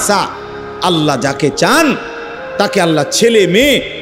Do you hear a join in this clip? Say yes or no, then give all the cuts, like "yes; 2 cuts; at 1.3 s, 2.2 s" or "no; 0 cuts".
no; 0 cuts